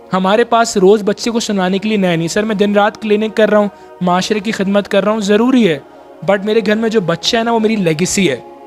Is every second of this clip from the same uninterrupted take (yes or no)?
yes